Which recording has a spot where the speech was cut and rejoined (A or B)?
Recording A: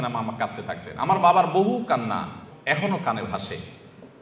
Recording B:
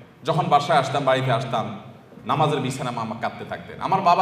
A